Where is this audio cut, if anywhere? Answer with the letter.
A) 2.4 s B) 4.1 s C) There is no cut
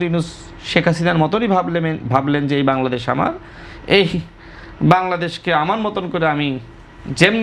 C